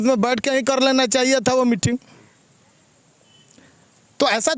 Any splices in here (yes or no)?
no